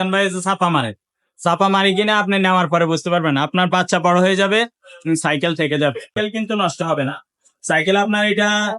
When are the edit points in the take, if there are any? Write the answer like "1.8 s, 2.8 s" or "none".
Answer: 6.2 s